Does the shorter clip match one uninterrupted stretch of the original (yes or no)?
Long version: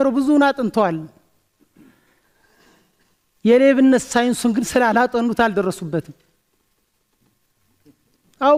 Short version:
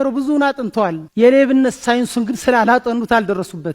no